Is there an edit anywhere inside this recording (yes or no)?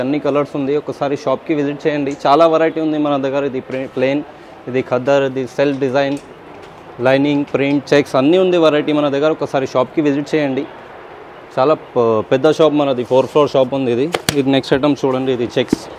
no